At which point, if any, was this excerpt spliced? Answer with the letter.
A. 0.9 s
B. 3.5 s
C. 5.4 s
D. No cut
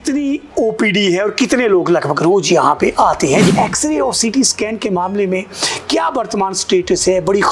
B